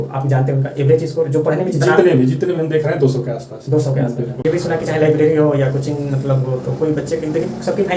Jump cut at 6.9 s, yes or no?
no